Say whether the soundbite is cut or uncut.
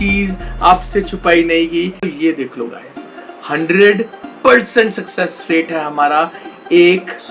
cut